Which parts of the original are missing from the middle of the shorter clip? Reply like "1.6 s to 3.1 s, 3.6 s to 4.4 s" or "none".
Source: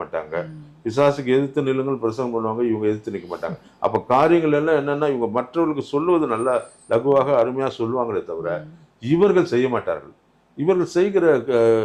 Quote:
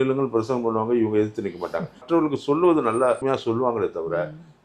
3.7 s to 5.5 s, 6.7 s to 7.5 s